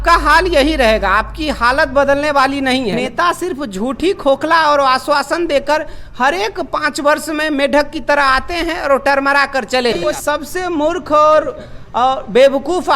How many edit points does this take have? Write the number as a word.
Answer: two